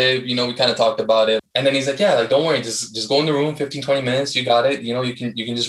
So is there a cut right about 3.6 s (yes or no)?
no